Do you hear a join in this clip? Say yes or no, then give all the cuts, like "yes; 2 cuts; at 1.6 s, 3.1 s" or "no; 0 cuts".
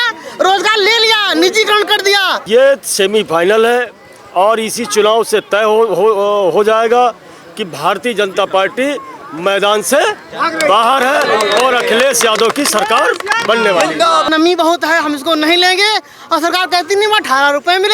yes; 2 cuts; at 2.4 s, 14.3 s